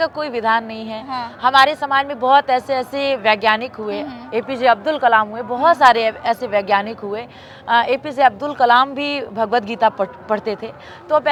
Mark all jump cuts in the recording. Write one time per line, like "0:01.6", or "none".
none